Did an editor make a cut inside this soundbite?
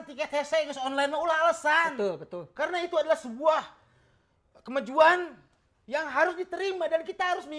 no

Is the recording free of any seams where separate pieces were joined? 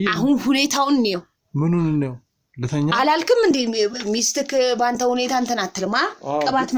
yes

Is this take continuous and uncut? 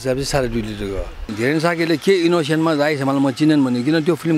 no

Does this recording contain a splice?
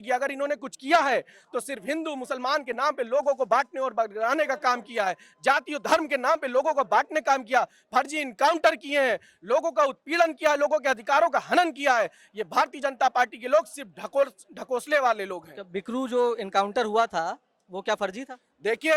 no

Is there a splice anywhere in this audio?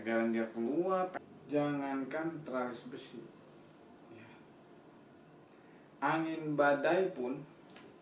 yes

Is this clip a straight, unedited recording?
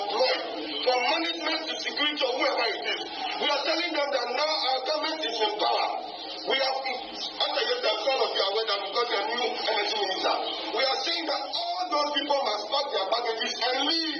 yes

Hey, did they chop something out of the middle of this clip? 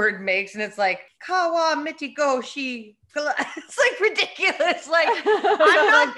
yes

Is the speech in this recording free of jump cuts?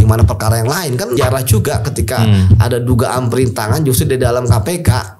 no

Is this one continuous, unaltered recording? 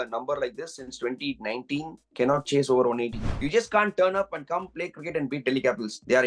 no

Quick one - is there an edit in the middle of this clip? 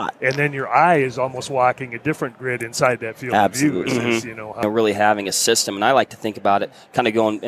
yes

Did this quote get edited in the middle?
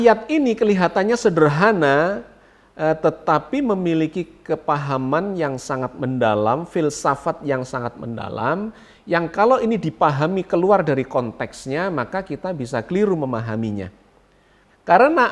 no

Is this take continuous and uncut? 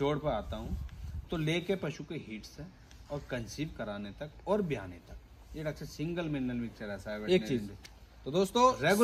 yes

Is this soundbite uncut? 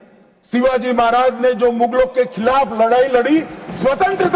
yes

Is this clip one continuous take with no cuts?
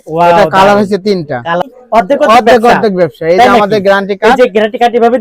no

